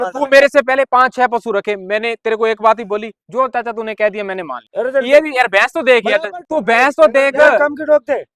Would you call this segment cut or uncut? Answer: cut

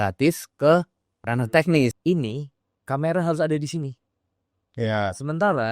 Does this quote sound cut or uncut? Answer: cut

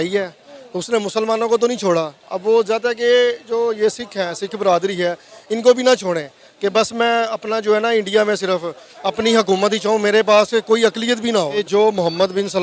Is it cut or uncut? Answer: cut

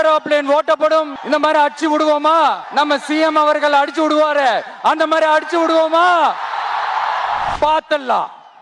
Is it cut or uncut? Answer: cut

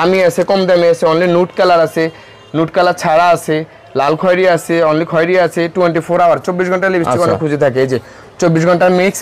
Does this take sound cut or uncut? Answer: uncut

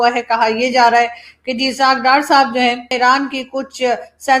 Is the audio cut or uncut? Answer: cut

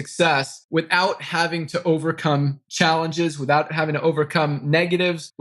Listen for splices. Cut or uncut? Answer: cut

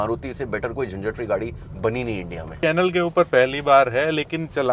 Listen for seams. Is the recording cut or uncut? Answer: cut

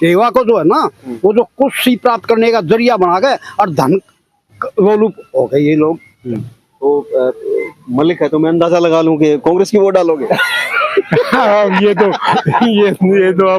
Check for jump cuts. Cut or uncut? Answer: cut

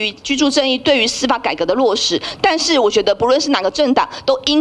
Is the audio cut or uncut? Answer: uncut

